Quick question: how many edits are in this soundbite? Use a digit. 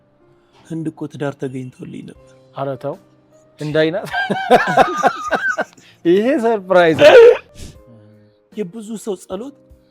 1